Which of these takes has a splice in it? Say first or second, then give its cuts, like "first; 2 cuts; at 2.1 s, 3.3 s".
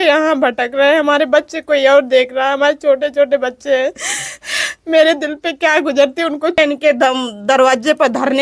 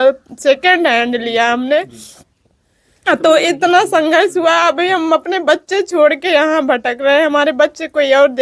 first; 1 cut; at 6.6 s